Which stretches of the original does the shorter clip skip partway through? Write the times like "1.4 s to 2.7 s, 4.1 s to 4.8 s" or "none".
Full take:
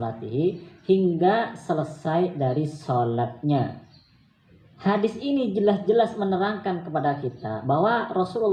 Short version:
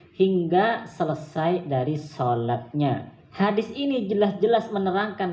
3.9 s to 4.6 s